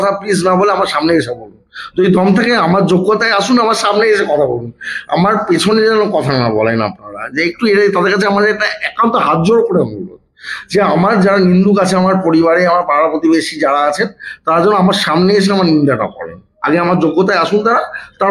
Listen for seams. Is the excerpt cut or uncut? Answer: uncut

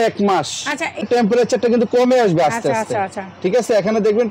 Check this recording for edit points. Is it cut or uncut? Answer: cut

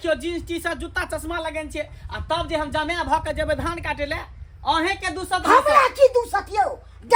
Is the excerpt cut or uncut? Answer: uncut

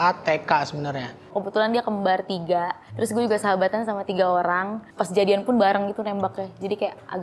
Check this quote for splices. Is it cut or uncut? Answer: cut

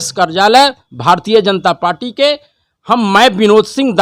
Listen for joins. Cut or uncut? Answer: uncut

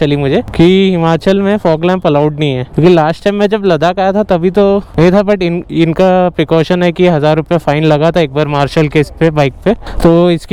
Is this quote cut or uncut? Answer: uncut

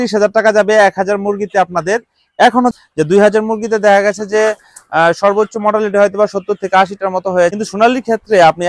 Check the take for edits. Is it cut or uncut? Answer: cut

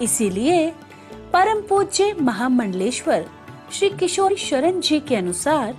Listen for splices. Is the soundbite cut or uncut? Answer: cut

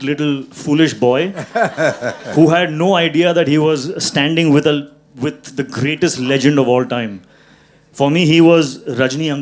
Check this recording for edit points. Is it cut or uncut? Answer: uncut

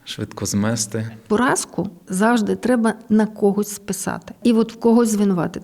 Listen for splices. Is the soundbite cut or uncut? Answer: cut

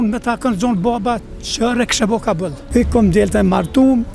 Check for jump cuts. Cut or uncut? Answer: cut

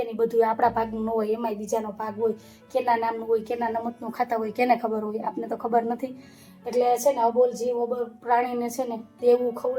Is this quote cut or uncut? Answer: uncut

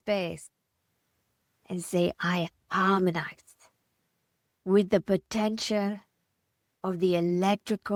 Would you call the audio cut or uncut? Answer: uncut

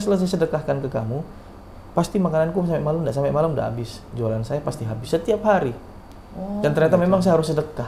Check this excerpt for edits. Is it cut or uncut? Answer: uncut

